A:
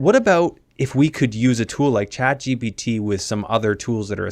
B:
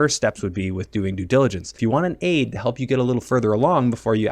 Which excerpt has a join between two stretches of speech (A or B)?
B